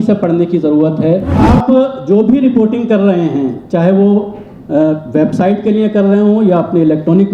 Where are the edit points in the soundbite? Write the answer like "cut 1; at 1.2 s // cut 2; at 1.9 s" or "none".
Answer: cut 1; at 1.4 s